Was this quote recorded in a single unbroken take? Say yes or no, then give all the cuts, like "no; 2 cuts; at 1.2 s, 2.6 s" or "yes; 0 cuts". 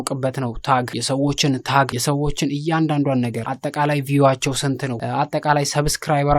no; 4 cuts; at 1.0 s, 1.9 s, 3.5 s, 5.0 s